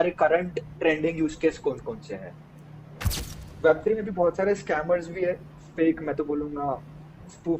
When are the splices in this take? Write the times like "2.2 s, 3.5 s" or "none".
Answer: 3.2 s